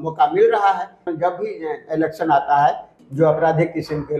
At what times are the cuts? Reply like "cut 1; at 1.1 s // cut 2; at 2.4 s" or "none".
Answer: cut 1; at 1.0 s // cut 2; at 2.9 s